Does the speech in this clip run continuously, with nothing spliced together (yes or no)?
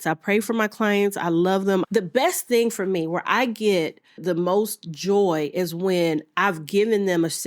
no